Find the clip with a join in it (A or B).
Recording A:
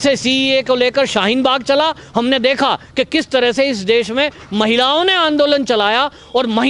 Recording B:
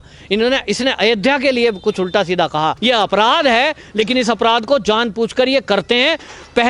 B